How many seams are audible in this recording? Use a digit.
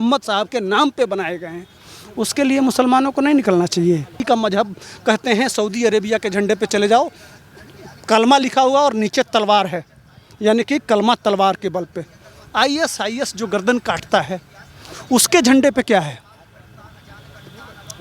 1